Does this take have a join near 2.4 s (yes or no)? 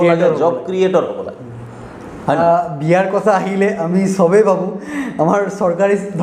yes